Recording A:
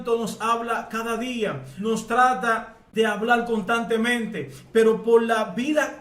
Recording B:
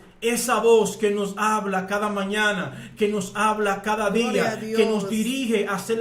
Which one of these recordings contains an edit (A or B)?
A